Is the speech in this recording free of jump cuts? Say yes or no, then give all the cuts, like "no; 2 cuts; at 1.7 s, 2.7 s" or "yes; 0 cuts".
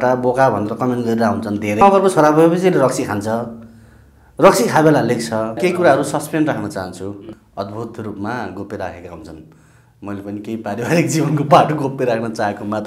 no; 3 cuts; at 1.8 s, 5.6 s, 7.3 s